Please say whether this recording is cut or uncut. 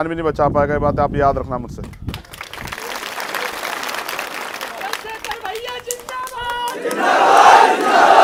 uncut